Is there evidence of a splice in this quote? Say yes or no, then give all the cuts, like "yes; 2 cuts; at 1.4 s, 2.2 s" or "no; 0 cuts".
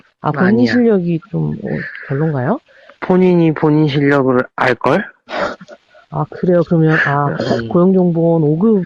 no; 0 cuts